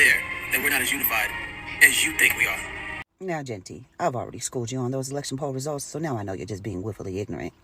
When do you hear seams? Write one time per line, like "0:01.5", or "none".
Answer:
0:03.0